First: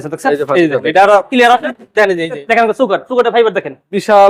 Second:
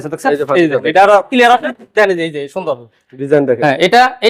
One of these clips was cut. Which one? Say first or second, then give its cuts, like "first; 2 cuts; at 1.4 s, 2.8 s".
first; 1 cut; at 2.4 s